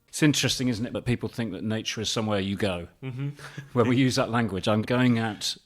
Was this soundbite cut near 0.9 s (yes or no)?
yes